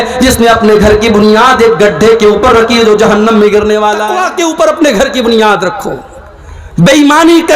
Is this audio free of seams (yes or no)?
no